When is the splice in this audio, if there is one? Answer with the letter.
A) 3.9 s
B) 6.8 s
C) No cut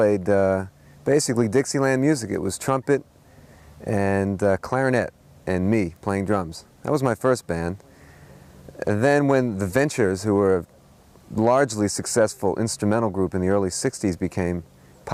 C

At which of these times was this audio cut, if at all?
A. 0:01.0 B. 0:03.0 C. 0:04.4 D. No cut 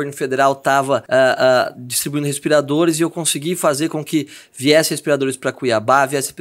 A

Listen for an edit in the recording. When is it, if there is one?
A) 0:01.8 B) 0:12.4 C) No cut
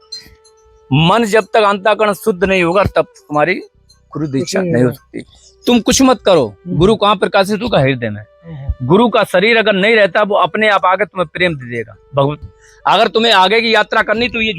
B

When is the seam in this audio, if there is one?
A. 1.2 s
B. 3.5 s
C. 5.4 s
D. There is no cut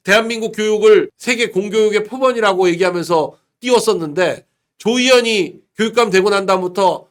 D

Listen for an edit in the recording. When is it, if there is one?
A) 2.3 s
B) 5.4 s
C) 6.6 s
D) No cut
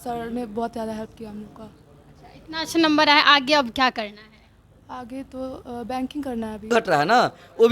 C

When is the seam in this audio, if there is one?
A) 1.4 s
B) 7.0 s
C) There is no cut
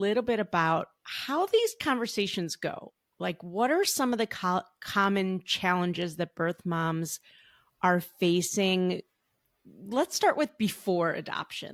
C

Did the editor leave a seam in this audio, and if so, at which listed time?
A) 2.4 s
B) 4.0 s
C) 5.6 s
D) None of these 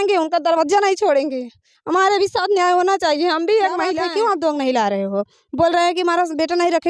B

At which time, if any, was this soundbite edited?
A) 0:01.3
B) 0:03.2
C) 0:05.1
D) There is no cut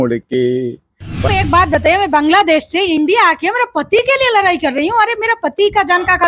A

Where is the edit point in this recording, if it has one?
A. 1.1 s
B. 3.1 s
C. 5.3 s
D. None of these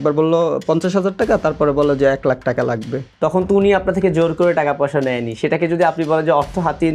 B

